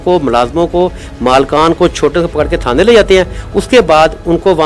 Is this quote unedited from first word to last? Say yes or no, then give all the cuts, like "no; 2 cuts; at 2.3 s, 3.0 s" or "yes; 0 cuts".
yes; 0 cuts